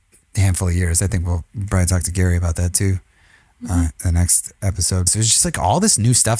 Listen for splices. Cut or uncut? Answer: cut